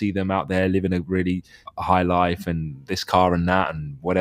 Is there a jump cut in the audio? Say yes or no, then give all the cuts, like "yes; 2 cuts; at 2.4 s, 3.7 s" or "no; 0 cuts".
yes; 1 cut; at 1.6 s